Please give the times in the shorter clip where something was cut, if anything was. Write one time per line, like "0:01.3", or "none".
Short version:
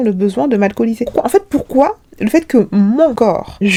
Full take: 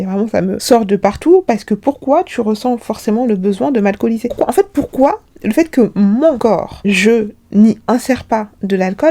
none